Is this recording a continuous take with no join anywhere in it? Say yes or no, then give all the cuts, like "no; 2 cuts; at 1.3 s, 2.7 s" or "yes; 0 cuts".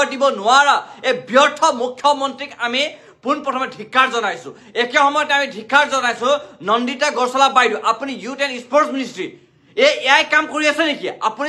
yes; 0 cuts